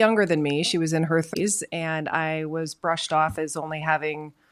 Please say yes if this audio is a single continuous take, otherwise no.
no